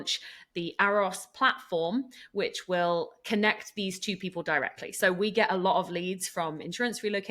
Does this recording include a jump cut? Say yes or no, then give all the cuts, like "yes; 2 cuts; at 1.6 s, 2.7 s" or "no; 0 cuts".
no; 0 cuts